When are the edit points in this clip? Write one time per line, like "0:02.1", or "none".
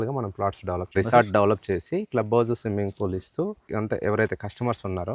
0:00.9
0:03.7